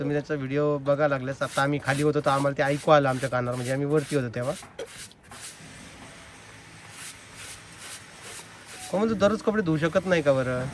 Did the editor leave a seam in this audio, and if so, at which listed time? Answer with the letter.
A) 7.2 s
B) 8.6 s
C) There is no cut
C